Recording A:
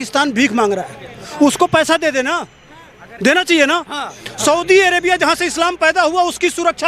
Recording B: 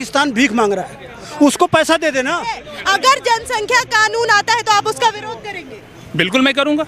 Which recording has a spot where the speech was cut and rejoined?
B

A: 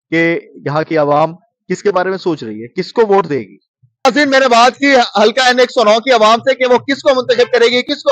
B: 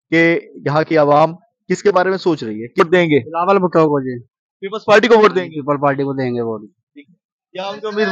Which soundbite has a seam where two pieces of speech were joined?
B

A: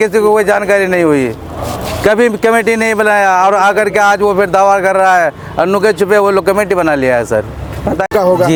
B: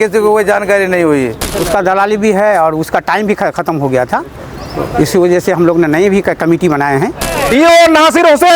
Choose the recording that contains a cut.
B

